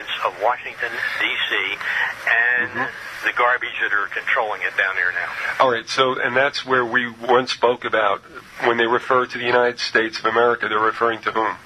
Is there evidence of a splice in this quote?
yes; 1 cut; at 6.9 s

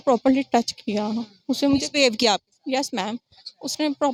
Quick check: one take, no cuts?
yes; 0 cuts

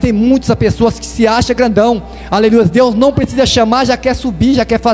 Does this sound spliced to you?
no; 0 cuts

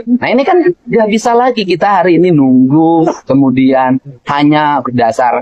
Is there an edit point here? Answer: no; 0 cuts

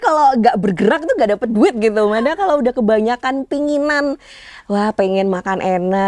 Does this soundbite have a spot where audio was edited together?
no; 0 cuts

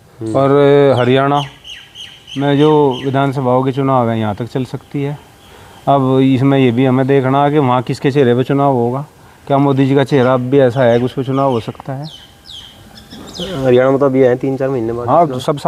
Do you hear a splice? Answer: no; 0 cuts

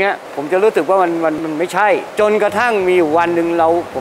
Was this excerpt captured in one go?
yes; 0 cuts

